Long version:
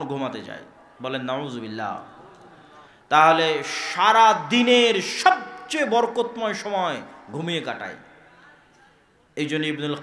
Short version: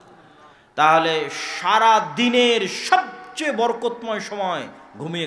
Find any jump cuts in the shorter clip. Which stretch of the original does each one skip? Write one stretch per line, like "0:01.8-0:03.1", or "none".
none